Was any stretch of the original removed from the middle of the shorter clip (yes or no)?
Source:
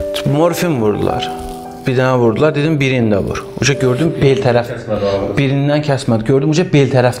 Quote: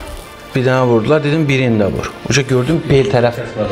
no